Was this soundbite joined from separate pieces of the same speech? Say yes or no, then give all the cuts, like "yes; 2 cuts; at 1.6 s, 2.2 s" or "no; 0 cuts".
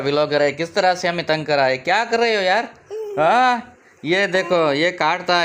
no; 0 cuts